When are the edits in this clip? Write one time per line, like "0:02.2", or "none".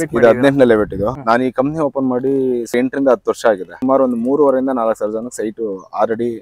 0:01.1
0:02.7
0:03.8